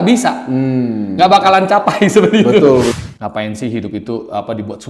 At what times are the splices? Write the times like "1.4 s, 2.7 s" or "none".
2.9 s